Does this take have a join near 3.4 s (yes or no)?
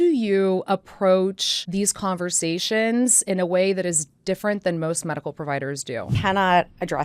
no